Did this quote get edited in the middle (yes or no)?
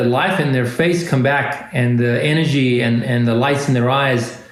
no